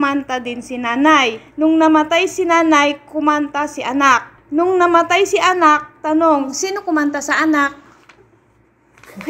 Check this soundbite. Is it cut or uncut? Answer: uncut